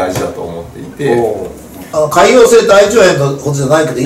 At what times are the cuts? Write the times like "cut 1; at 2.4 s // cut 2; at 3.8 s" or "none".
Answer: cut 1; at 1.9 s

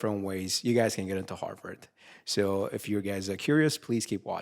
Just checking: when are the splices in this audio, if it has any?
none

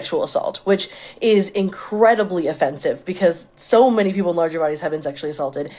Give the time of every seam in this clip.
cut 1; at 3.0 s

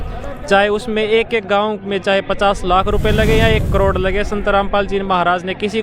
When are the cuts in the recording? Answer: none

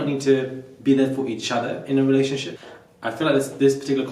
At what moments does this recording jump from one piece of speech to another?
cut 1; at 2.5 s

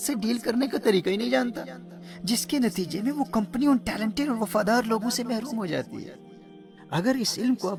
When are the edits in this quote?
none

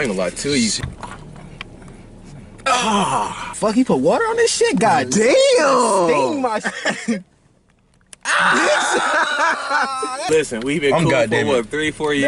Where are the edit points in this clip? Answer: cut 1; at 3.4 s // cut 2; at 10.2 s

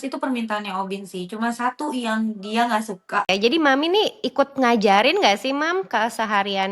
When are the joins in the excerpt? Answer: cut 1; at 3.3 s

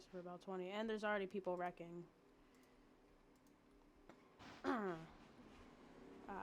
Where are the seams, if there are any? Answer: cut 1; at 4.2 s

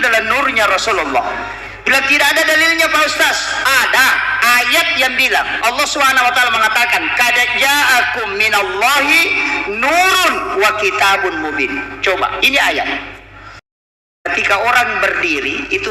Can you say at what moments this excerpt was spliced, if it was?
cut 1; at 14.1 s

